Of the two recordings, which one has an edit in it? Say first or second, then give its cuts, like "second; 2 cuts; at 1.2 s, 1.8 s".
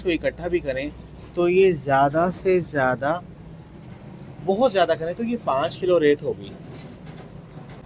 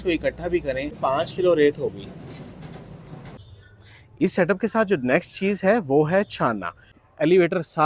second; 3 cuts; at 1.0 s, 3.4 s, 6.9 s